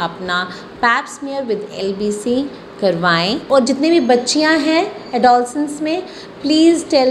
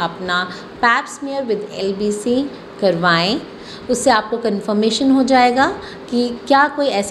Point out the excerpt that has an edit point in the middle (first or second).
first